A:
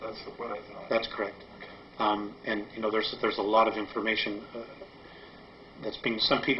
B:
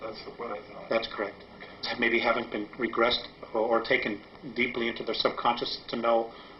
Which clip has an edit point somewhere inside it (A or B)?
A